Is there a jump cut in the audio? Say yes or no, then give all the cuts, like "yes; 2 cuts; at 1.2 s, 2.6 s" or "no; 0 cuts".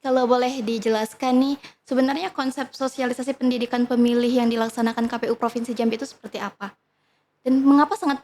yes; 1 cut; at 1.1 s